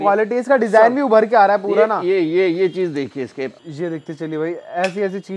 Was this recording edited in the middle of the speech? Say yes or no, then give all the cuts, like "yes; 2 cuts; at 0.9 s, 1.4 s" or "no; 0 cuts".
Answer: yes; 1 cut; at 3.6 s